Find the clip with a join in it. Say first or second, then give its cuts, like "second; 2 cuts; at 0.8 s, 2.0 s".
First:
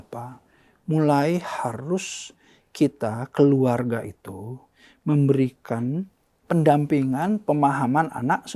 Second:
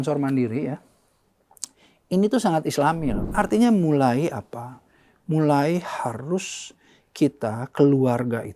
second; 1 cut; at 3.2 s